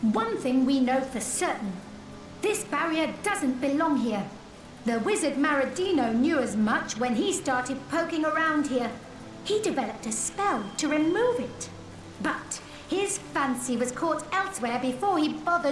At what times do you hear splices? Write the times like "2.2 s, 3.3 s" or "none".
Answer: none